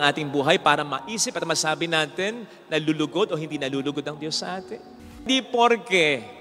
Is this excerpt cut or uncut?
cut